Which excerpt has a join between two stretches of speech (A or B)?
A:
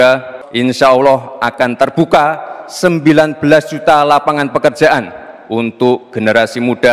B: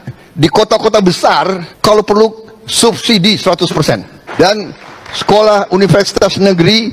B